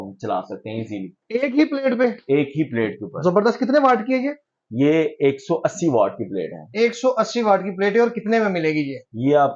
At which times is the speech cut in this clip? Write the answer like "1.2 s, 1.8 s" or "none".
none